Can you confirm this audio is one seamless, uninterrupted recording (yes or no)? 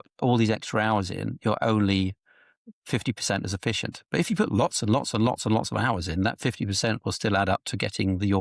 yes